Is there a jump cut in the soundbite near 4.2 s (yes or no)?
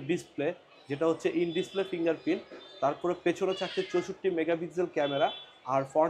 no